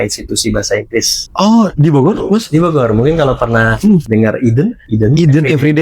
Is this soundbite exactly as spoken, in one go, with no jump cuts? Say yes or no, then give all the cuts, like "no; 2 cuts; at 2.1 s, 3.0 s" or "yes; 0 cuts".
no; 3 cuts; at 1.2 s, 4.0 s, 4.8 s